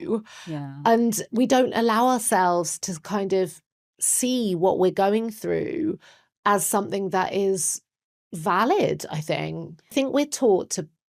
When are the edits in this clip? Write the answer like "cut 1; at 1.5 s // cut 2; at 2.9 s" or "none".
cut 1; at 9.9 s